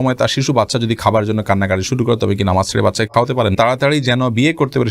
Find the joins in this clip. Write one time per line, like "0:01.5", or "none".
0:03.5